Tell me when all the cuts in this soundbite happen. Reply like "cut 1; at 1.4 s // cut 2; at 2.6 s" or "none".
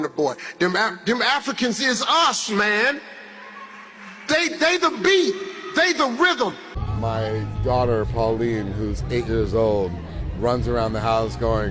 cut 1; at 6.6 s